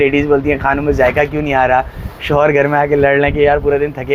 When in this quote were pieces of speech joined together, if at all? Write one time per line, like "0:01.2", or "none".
none